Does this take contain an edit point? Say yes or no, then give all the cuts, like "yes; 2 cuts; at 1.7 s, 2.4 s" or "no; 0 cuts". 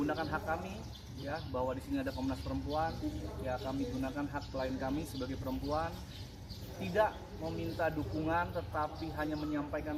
no; 0 cuts